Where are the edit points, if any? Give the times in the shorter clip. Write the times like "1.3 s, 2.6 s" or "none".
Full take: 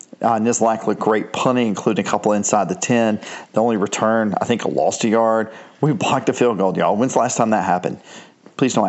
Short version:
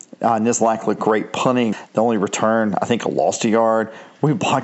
1.8 s